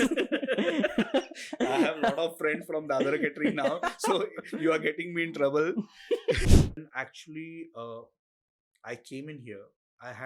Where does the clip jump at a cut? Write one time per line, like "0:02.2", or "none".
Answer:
0:06.4